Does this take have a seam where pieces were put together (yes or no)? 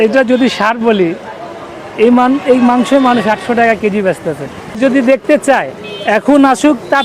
yes